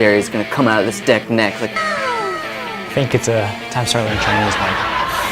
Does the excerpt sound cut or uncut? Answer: cut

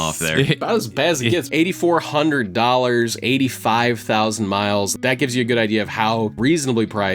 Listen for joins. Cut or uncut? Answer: cut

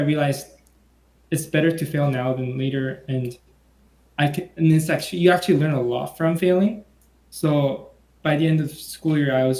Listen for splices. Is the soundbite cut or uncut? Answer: uncut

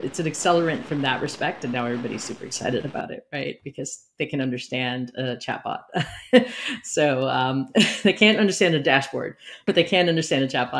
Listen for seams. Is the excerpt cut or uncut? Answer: cut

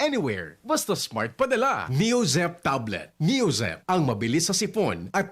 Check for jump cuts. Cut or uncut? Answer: cut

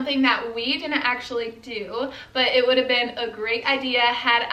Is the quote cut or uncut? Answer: uncut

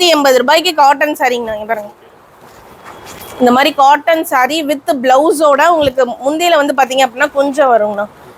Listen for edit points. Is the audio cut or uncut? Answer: uncut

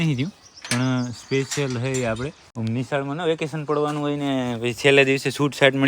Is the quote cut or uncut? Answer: cut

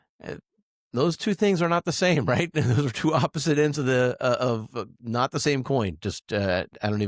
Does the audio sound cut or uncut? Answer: uncut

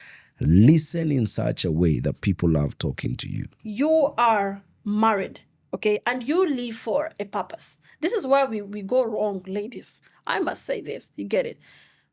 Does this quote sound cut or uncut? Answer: cut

